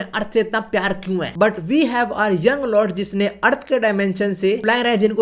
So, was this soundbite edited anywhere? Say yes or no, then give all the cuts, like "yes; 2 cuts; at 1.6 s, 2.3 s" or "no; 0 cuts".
yes; 1 cut; at 1.3 s